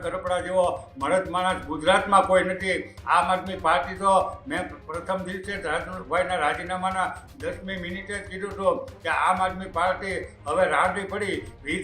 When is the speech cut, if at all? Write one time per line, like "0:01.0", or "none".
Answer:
none